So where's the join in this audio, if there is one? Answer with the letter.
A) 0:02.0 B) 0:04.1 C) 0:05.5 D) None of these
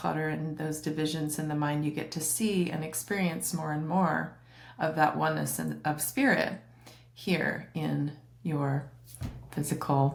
D